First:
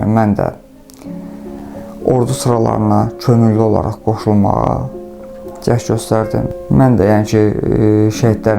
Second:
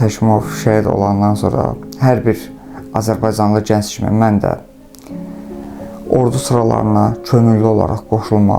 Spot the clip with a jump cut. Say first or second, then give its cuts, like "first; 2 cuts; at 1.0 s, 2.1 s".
first; 1 cut; at 6.5 s